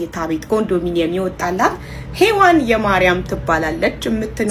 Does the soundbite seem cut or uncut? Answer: uncut